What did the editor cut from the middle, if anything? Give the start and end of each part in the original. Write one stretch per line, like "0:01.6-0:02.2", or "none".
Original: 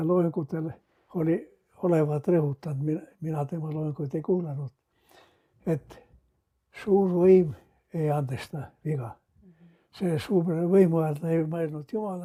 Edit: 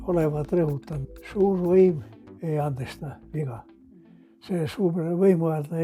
0:02.7-0:06.4

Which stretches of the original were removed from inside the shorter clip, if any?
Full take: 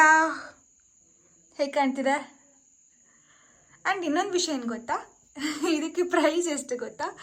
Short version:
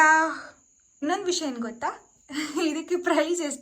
0:01.0-0:04.0

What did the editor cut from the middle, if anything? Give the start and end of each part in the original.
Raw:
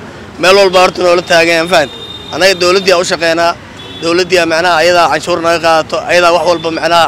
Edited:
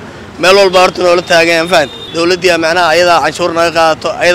0:02.0-0:03.9

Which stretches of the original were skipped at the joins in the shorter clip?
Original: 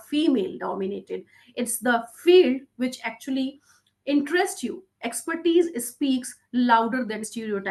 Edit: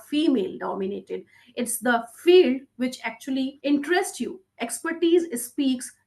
0:03.6-0:04.0

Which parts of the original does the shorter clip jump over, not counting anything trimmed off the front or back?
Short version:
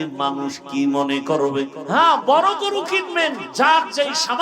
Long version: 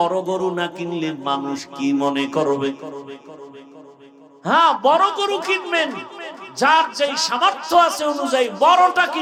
0:02.8-0:04.3
0:06.0-0:06.4

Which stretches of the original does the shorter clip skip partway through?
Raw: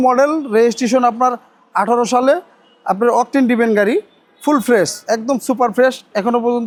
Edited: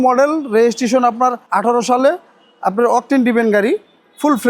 0:01.4-0:01.6

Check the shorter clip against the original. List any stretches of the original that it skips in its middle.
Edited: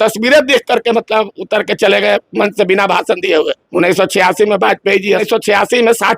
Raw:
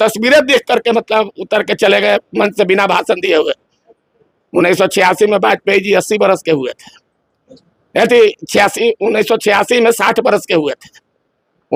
0:03.6-0:04.4
0:06.0-0:09.2

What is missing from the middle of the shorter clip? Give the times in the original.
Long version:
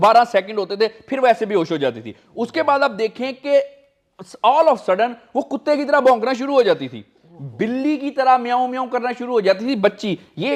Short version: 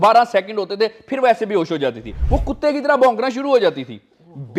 0:02.2-0:05.2

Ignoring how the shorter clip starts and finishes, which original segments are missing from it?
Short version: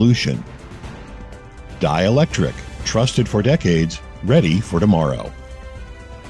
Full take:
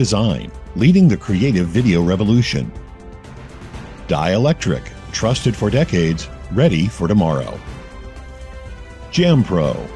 none

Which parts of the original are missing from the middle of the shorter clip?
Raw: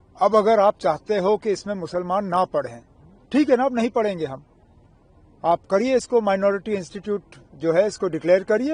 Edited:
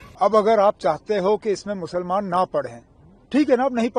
none

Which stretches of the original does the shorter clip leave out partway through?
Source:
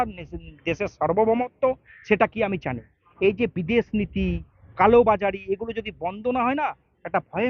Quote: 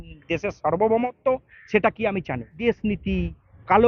0:02.9-0:03.6

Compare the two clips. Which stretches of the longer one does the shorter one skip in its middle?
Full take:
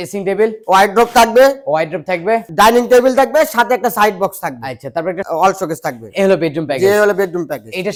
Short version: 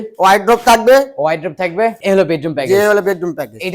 0:02.5-0:06.1

